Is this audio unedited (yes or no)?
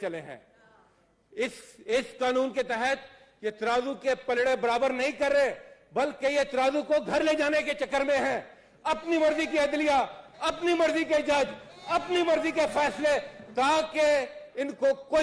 yes